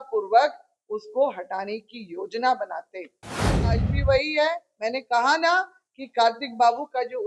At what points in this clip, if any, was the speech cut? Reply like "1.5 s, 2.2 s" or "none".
3.5 s